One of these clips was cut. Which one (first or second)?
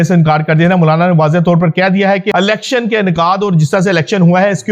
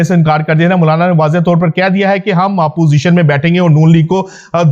first